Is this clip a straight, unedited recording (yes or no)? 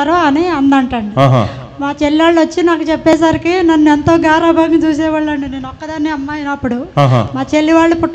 yes